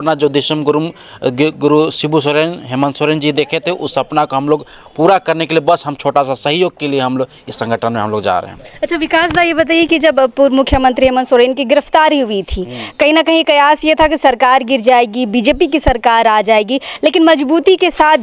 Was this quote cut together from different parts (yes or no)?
no